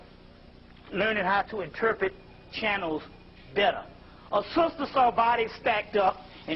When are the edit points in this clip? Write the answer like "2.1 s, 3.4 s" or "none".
none